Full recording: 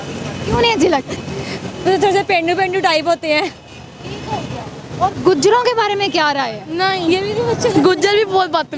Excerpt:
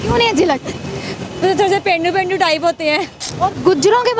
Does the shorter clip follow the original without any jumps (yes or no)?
no